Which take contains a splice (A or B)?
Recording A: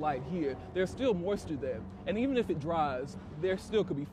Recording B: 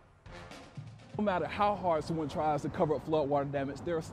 B